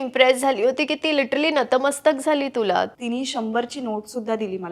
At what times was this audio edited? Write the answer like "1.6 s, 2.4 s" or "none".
2.9 s